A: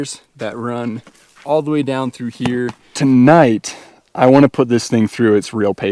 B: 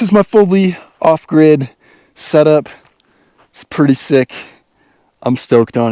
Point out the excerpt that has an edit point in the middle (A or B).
A